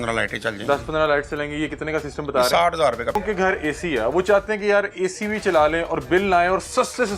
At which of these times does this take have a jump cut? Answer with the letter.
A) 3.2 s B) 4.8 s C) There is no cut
A